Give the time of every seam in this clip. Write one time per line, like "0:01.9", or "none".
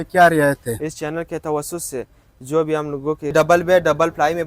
0:03.3